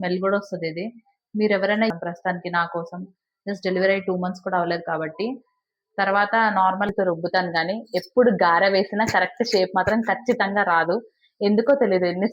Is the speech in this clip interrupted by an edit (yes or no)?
yes